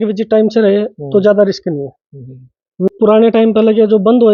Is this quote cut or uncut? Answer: cut